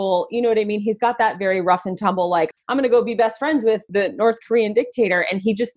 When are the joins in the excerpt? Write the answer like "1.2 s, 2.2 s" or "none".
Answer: 2.5 s, 3.9 s